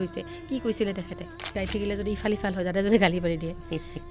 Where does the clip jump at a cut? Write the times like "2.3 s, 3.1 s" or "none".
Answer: 1.5 s